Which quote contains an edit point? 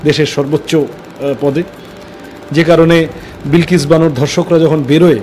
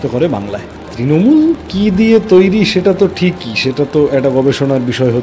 second; 1 cut; at 0.9 s

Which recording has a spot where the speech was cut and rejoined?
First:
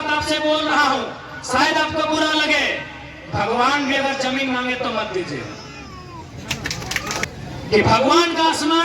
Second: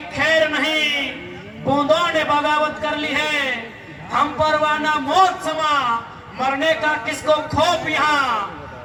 first; 1 cut; at 7.2 s

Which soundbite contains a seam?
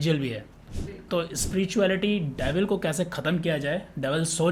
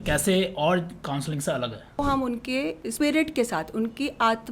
second; 2 cuts; at 2.0 s, 2.9 s

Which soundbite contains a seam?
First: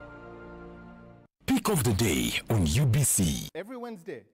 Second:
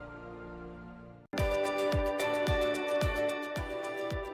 first; 1 cut; at 1.2 s

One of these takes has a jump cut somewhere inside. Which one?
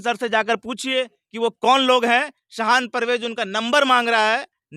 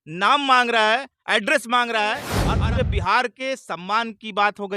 second; 1 cut; at 2.4 s

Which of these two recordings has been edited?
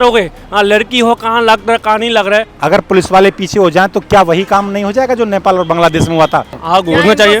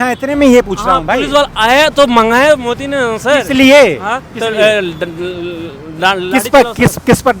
first; 2 cuts; at 2.5 s, 6.6 s

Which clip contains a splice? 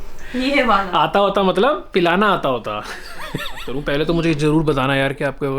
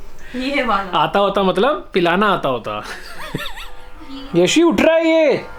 first; 1 cut; at 3.7 s

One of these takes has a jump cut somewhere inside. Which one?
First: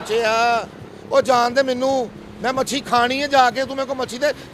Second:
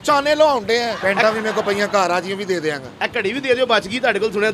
second; 1 cut; at 1.0 s

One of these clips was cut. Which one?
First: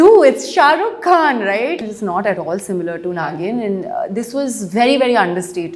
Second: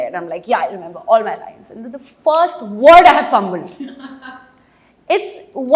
first; 1 cut; at 1.8 s

